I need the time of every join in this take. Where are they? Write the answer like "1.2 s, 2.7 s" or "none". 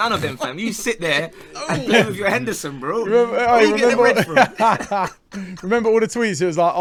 none